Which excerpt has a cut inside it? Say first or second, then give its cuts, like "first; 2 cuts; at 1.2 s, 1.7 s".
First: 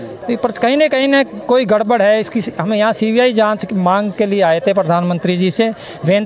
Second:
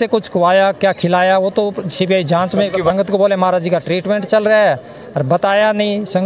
second; 1 cut; at 2.9 s